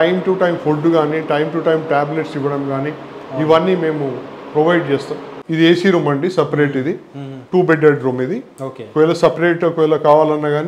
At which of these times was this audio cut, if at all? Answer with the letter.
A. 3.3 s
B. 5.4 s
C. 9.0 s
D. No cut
B